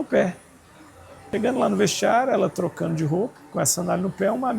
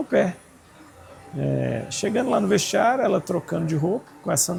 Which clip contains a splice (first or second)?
first